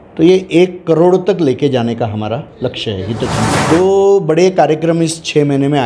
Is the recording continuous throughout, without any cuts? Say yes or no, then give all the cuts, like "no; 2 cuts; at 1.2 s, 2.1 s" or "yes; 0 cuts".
no; 1 cut; at 3.5 s